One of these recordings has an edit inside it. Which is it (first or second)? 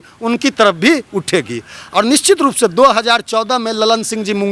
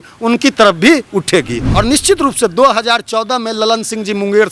second